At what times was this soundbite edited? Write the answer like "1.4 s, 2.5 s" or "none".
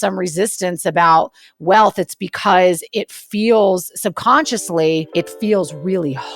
5.1 s